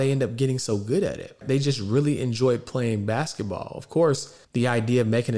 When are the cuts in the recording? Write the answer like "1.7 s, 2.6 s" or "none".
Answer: 1.4 s, 4.4 s